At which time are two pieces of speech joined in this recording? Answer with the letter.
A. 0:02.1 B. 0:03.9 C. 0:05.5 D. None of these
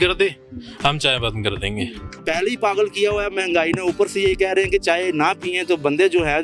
A